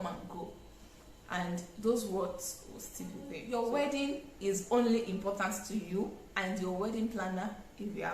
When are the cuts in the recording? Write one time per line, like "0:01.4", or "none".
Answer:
0:03.4